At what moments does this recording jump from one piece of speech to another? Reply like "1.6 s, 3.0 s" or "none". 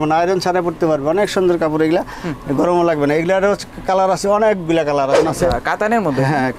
5.2 s